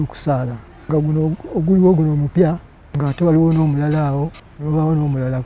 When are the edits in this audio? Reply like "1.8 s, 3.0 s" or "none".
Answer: 0.9 s, 2.4 s, 4.5 s

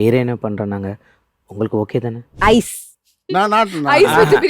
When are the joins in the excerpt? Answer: 2.3 s

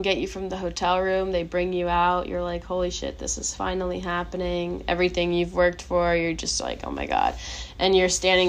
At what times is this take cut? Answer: none

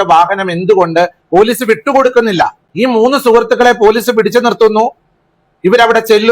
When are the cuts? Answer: 2.6 s

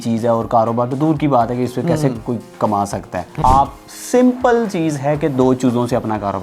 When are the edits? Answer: 3.4 s

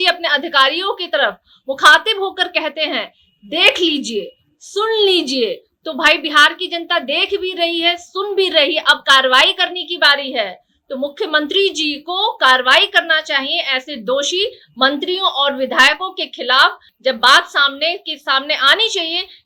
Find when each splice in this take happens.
none

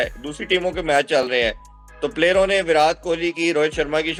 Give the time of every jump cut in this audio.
none

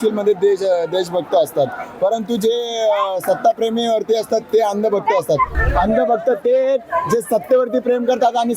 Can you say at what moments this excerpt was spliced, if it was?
5.6 s

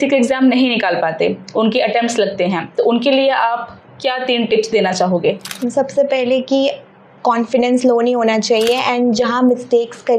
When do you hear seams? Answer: none

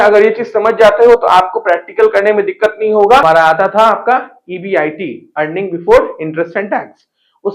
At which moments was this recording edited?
3.2 s

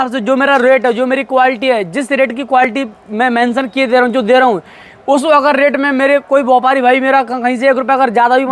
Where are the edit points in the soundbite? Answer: none

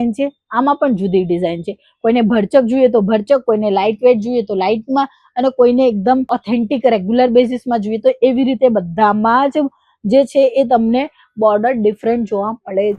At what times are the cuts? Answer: none

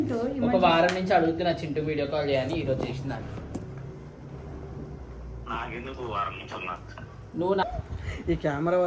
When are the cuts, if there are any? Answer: 7.6 s

